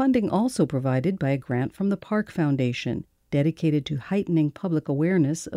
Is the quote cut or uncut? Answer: uncut